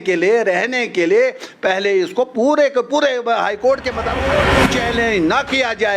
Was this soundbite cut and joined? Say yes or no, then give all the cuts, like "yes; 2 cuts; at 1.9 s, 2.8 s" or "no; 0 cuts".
yes; 1 cut; at 4.5 s